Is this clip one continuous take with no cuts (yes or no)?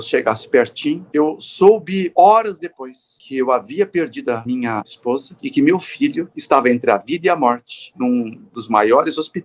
no